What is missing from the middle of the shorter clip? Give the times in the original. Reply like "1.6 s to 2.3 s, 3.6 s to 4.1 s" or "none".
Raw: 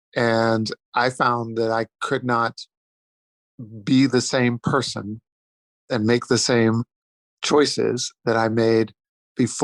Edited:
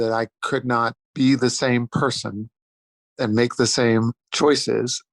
2.6 s to 3.7 s, 6.9 s to 7.3 s